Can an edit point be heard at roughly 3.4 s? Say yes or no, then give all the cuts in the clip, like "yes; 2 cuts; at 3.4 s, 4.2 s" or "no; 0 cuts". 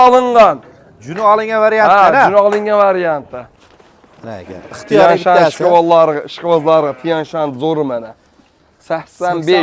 yes; 1 cut; at 3.4 s